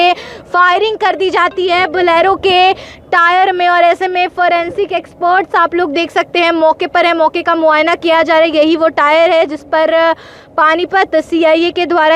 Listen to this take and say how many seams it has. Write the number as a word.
zero